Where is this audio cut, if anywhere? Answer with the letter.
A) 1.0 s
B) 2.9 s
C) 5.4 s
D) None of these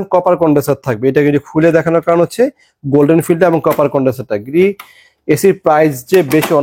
D